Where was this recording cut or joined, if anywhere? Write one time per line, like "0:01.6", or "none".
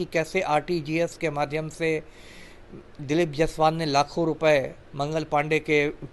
none